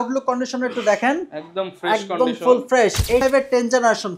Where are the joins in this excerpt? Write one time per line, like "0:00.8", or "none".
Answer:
0:03.2